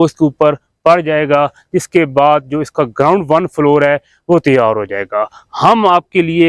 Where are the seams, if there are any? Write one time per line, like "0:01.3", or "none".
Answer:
none